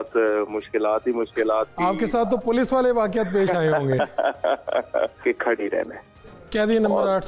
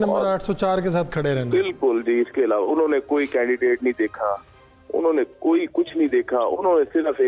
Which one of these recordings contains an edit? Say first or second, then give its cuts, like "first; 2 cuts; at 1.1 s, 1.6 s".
first; 1 cut; at 5.2 s